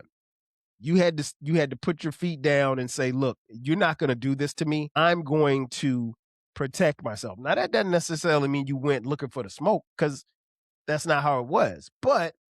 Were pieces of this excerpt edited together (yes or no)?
yes